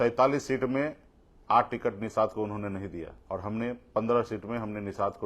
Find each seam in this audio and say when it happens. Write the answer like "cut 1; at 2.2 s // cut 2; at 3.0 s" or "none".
cut 1; at 3.1 s